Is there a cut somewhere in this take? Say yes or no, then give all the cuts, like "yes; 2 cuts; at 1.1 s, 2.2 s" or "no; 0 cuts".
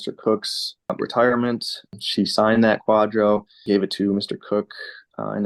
yes; 1 cut; at 0.9 s